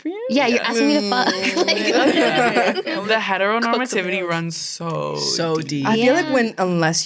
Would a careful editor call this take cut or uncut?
uncut